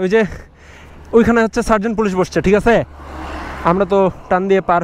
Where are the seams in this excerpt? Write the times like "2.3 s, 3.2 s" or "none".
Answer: none